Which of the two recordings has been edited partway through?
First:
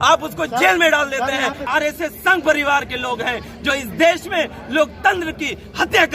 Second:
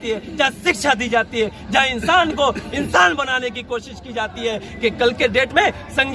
first; 1 cut; at 1.6 s

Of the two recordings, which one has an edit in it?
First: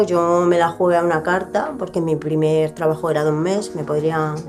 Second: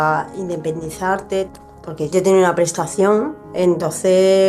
second; 2 cuts; at 1.5 s, 3.4 s

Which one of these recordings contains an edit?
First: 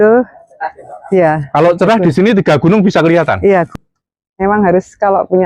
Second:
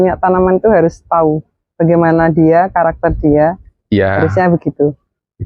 first; 1 cut; at 3.7 s

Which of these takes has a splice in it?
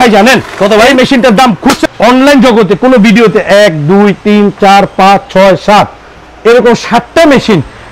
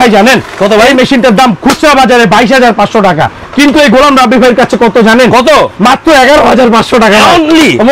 first; 1 cut; at 1.8 s

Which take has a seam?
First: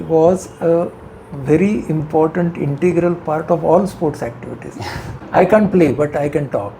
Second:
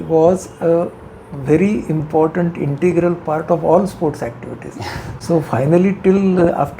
first; 1 cut; at 5.2 s

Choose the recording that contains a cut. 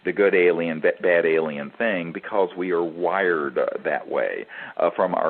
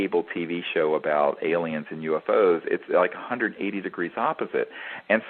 first; 1 cut; at 2.9 s

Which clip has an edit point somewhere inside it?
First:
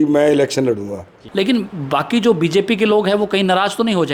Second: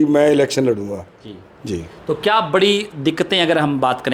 first; 1 cut; at 1.1 s

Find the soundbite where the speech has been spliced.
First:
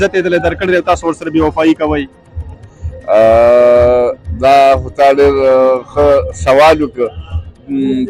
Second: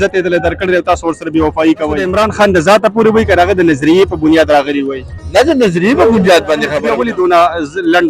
second; 2 cuts; at 2.1 s, 6.8 s

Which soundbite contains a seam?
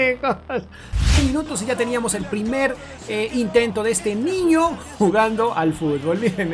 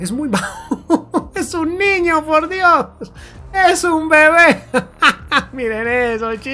first; 1 cut; at 1.1 s

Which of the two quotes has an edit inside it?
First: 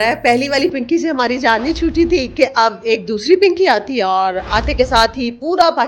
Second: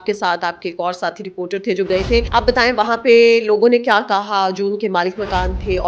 second; 1 cut; at 2.3 s

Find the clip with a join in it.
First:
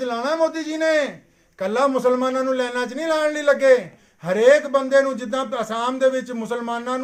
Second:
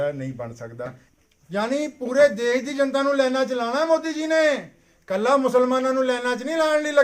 second; 1 cut; at 1.0 s

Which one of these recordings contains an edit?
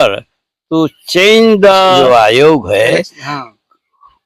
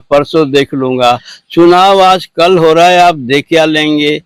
first; 1 cut; at 2.0 s

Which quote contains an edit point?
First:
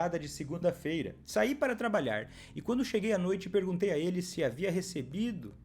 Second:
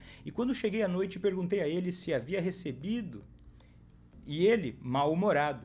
first; 1 cut; at 1.2 s

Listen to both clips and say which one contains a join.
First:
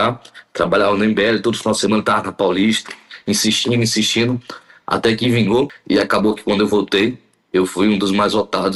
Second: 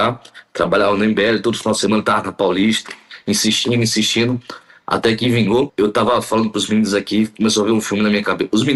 first; 1 cut; at 5.7 s

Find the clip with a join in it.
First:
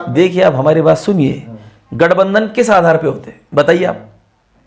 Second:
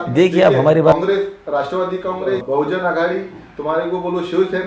second; 2 cuts; at 0.9 s, 2.4 s

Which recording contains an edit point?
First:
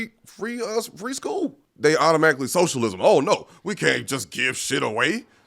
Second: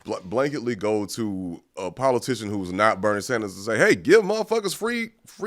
first; 1 cut; at 1.6 s

